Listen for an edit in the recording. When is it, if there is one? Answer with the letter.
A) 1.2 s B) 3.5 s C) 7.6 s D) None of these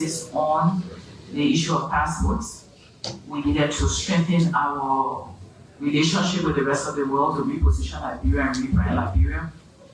B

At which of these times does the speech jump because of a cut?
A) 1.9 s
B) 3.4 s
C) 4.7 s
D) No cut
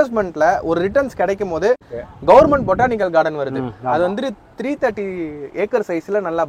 A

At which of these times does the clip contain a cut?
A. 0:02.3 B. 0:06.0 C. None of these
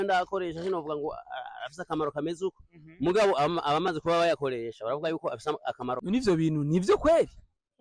B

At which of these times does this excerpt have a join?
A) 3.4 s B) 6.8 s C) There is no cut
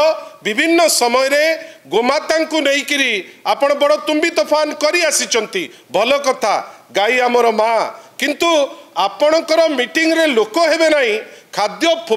C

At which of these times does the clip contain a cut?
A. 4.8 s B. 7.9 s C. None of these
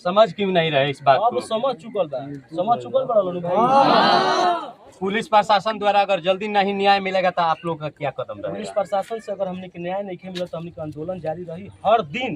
A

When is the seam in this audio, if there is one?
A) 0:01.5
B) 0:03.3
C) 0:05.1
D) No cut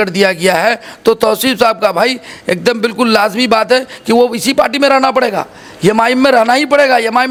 D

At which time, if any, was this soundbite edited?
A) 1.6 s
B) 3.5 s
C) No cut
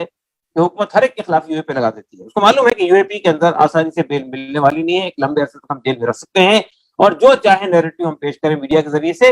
C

